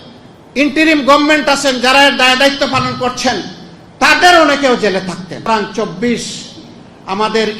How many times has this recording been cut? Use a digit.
1